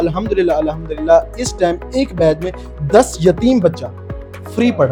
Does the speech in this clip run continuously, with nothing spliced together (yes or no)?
yes